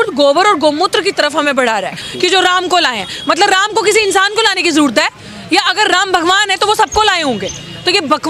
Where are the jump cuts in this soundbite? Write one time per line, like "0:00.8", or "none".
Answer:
0:02.0